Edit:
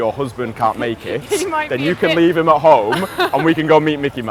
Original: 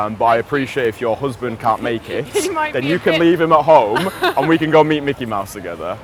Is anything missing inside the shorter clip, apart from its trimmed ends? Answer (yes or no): no